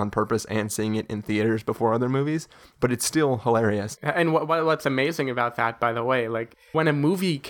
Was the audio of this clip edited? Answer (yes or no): yes